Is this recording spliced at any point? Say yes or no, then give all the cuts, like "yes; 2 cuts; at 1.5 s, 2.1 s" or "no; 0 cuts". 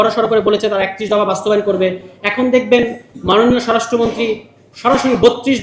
no; 0 cuts